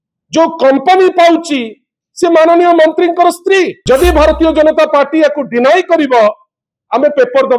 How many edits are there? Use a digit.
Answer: 1